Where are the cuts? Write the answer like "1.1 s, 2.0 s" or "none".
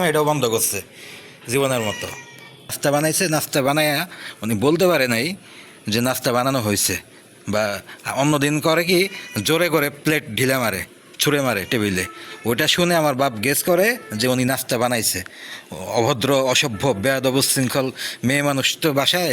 2.8 s

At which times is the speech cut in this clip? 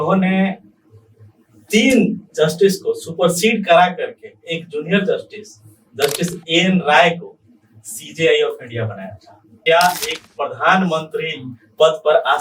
9.6 s

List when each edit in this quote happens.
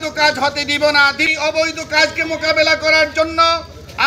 1.3 s

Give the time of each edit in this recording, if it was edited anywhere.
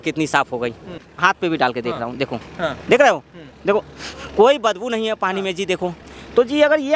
1.0 s

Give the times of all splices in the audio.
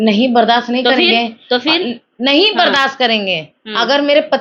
none

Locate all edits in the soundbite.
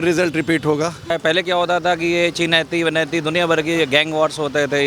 1.1 s

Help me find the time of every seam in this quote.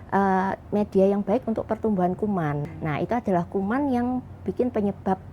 2.6 s

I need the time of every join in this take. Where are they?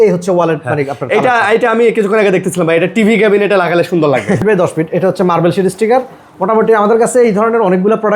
4.4 s

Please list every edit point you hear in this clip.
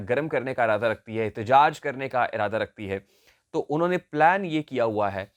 none

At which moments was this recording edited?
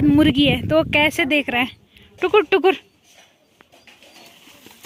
none

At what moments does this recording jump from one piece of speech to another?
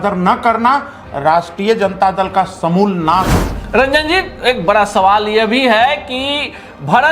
3.3 s

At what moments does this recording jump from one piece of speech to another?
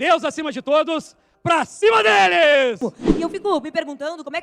2.8 s

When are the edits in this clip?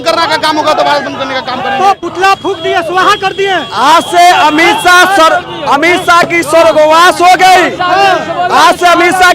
none

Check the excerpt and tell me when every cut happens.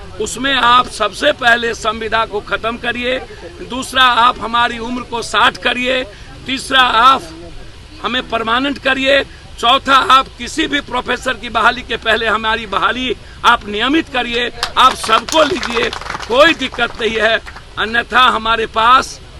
none

